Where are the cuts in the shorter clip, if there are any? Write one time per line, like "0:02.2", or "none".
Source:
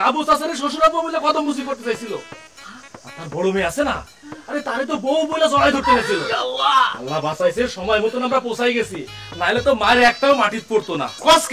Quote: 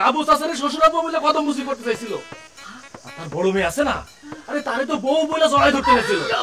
none

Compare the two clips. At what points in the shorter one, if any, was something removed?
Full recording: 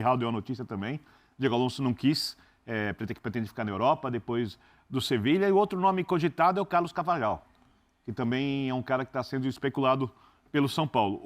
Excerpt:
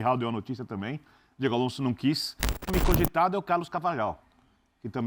0:02.7

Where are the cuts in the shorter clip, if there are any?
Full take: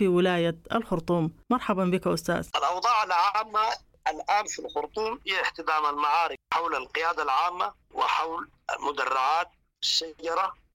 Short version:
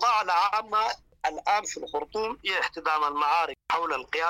none

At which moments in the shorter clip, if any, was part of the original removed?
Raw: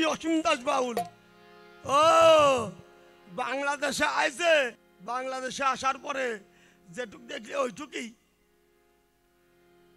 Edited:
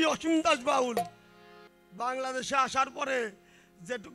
0:01.7

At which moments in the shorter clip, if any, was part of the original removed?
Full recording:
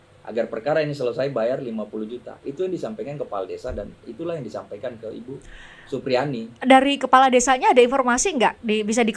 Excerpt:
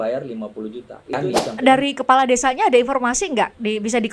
0:01.6

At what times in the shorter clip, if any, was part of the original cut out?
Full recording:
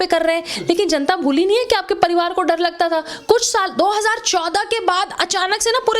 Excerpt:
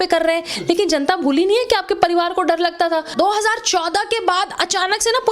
0:03.1

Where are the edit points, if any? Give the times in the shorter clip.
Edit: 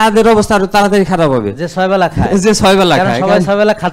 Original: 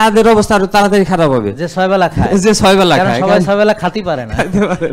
none

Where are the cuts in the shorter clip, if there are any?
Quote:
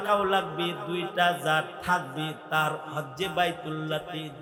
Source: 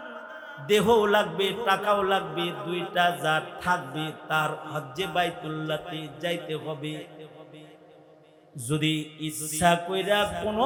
none

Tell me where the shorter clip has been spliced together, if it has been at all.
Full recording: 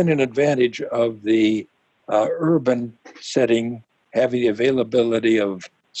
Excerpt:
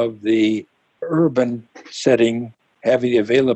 0:01.0

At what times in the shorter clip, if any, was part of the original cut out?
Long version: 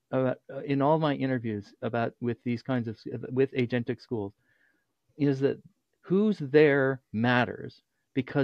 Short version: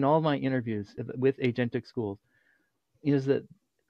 0:00.9

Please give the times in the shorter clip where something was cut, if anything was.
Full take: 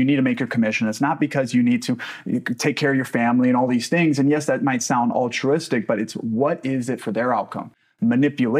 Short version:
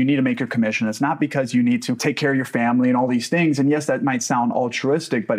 0:01.9

